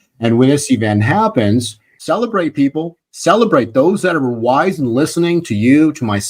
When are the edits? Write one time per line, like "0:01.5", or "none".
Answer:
0:01.9